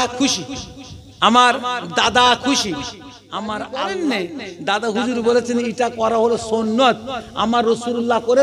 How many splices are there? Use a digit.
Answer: 1